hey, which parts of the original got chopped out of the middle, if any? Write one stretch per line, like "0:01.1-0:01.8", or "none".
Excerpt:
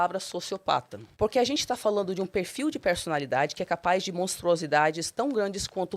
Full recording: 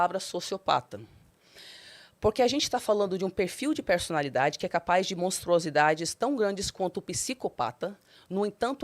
0:01.0-0:02.0